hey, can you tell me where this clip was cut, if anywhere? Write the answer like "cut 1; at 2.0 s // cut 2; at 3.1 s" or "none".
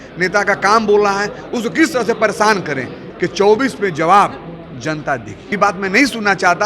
cut 1; at 3.1 s // cut 2; at 5.5 s